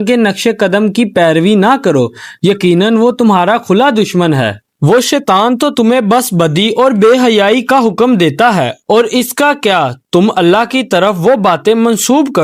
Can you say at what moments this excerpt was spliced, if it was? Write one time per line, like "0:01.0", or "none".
0:04.7